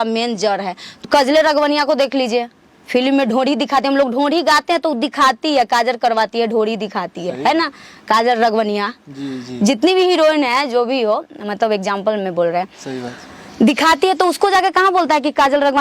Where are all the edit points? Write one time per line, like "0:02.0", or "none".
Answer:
0:01.0